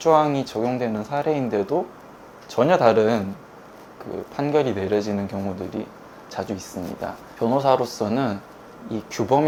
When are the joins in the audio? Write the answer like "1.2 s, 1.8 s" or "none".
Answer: none